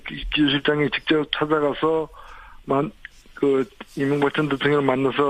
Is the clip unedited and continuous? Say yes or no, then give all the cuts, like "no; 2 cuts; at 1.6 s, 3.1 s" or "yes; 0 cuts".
yes; 0 cuts